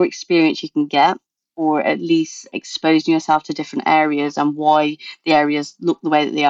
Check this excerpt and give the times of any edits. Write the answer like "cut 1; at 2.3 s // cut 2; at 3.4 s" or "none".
cut 1; at 2.5 s